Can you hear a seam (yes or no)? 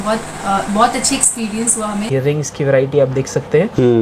yes